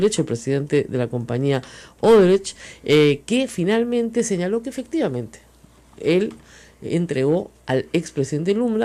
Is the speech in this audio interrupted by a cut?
no; 0 cuts

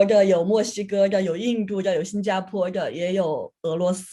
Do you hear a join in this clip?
no; 0 cuts

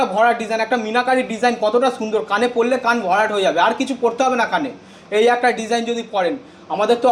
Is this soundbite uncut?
yes; 0 cuts

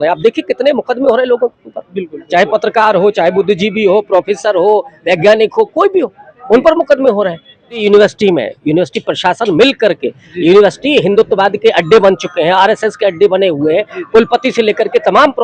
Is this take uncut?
no; 1 cut; at 7.8 s

